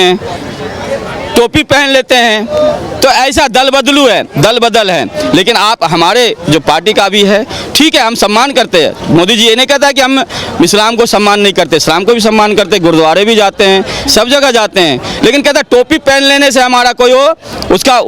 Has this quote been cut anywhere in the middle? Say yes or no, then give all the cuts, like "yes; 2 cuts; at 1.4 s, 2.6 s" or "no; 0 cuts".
no; 0 cuts